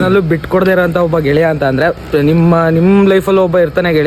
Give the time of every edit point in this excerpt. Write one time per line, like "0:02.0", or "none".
none